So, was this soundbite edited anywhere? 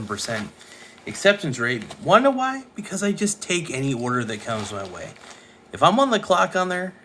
yes; 2 cuts; at 1.9 s, 5.2 s

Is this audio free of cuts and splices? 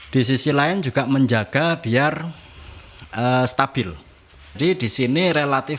no; 1 cut; at 4.5 s

